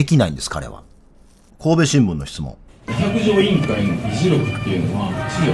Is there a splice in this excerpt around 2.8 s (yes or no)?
yes